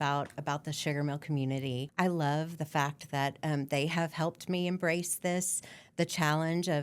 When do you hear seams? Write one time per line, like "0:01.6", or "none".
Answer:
0:01.9